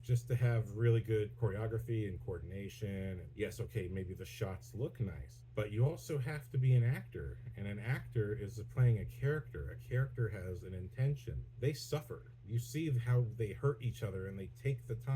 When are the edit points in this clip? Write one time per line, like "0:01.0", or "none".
0:01.3
0:03.2
0:05.3
0:11.4